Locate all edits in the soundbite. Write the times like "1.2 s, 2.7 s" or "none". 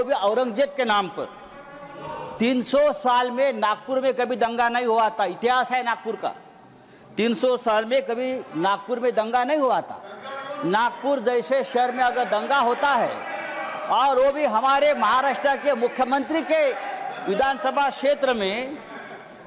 none